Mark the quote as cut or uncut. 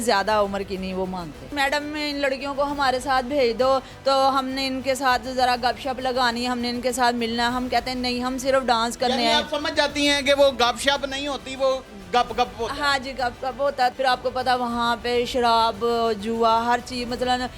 cut